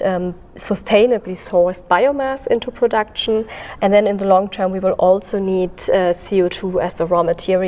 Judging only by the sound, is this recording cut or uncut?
uncut